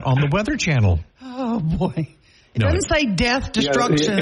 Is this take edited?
yes; 1 cut; at 3.3 s

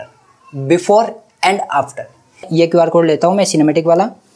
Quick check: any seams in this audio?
yes; 1 cut; at 2.5 s

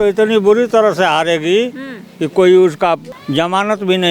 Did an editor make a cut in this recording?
yes; 1 cut; at 3.1 s

